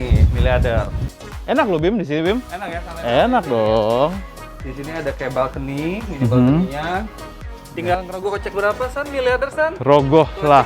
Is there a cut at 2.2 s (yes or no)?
no